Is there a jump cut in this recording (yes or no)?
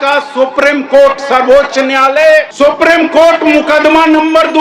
yes